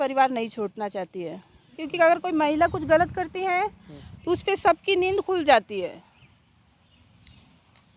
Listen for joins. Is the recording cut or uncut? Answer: cut